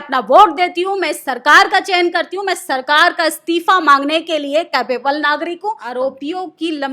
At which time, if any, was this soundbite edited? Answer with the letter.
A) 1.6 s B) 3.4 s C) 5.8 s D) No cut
C